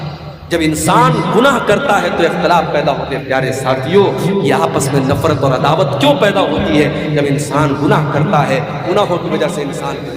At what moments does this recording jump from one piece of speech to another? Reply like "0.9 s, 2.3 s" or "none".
3.2 s